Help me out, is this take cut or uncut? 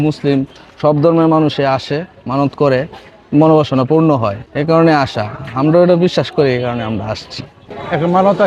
uncut